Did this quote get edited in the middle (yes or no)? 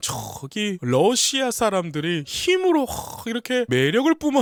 no